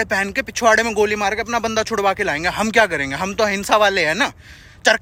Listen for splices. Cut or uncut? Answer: uncut